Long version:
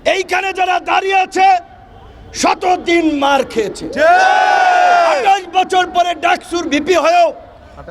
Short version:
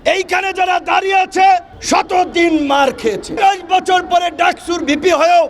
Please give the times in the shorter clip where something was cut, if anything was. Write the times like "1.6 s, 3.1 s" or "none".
1.7 s, 3.4 s